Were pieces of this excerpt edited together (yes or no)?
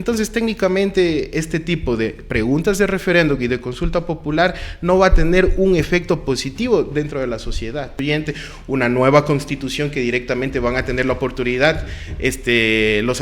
yes